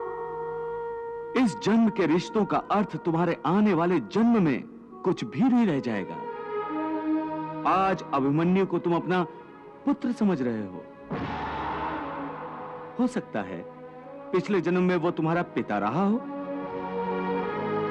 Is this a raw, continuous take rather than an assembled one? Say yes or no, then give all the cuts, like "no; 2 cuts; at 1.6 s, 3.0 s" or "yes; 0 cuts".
yes; 0 cuts